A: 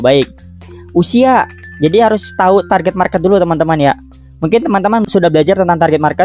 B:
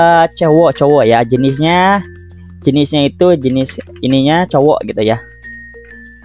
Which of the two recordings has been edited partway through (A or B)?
A